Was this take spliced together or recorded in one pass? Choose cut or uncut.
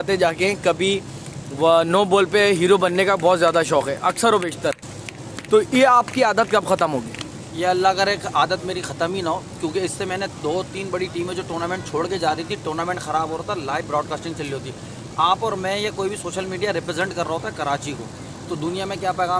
uncut